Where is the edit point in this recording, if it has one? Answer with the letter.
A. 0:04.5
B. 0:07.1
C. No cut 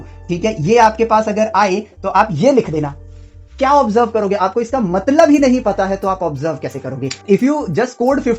B